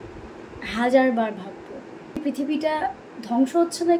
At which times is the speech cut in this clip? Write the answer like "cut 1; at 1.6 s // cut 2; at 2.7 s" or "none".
cut 1; at 2.3 s